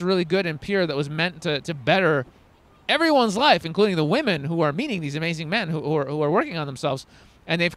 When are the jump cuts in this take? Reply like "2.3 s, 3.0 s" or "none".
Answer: none